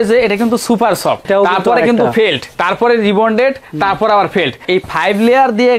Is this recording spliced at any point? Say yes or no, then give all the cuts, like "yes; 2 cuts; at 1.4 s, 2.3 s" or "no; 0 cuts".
yes; 3 cuts; at 1.3 s, 2.5 s, 4.6 s